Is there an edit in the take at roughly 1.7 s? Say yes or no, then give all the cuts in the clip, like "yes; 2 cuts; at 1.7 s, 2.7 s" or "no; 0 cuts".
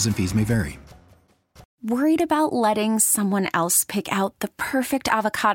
yes; 1 cut; at 1.7 s